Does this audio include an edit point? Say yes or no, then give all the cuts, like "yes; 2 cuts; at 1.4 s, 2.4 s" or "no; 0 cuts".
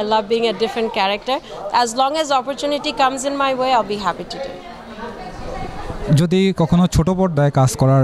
no; 0 cuts